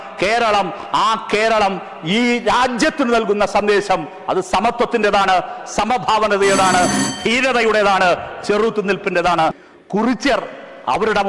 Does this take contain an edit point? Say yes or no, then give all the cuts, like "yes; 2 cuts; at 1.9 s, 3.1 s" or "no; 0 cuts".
yes; 1 cut; at 9.5 s